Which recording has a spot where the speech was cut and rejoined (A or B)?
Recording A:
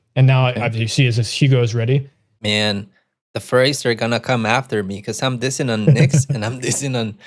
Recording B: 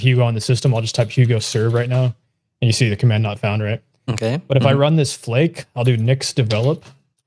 A